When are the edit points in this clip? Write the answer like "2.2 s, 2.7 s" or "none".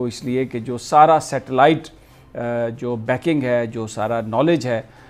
none